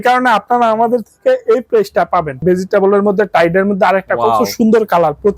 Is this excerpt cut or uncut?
cut